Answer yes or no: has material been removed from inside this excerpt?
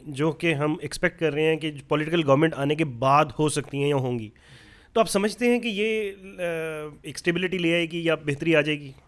no